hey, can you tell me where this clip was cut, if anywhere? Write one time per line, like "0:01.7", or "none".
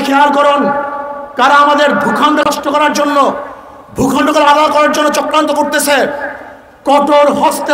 0:02.4